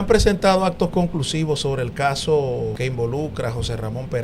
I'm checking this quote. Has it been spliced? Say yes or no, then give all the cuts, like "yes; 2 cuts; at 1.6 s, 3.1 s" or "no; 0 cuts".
yes; 1 cut; at 2.8 s